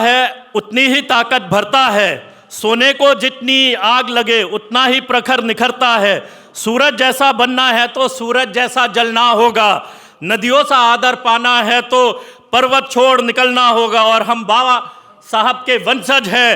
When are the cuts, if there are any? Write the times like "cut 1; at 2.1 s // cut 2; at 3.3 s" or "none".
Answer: none